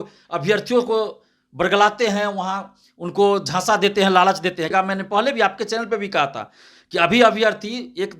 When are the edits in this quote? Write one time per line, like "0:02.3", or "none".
0:04.7